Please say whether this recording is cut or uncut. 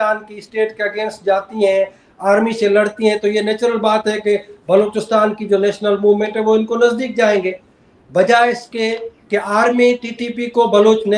uncut